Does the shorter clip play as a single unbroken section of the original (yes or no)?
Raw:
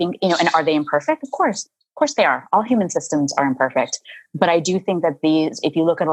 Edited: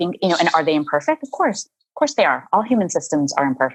yes